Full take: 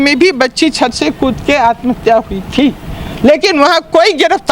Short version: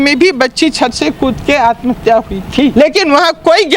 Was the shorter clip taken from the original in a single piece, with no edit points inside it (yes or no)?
no